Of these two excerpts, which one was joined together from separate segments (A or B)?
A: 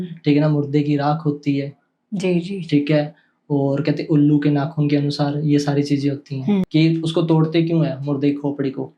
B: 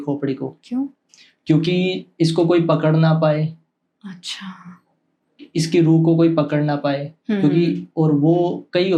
A